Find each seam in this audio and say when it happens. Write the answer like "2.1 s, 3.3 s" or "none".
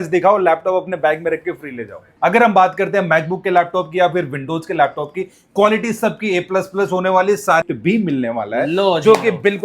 2.0 s, 7.6 s